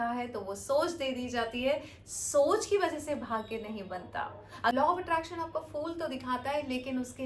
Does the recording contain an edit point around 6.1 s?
no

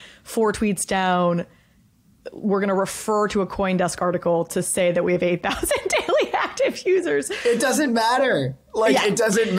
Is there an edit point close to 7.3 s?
yes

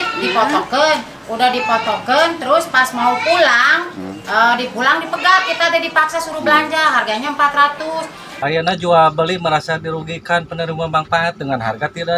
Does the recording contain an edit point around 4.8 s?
no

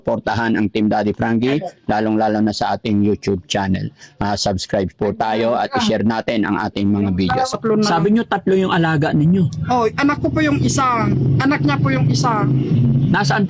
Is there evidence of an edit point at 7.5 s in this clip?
yes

